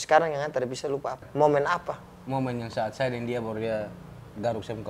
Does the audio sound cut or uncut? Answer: cut